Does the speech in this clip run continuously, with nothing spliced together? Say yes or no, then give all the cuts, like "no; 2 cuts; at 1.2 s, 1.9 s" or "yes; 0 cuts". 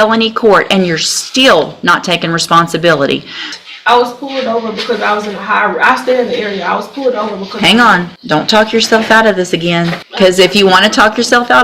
no; 3 cuts; at 3.5 s, 8.1 s, 10.0 s